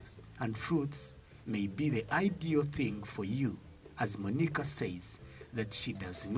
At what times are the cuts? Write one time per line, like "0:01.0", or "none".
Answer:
none